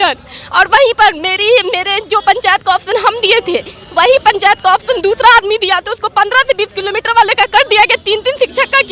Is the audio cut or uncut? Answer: uncut